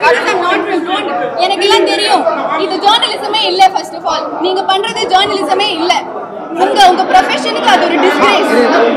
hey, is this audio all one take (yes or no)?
yes